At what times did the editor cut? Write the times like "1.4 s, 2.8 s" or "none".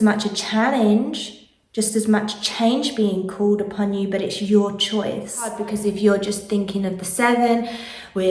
5.6 s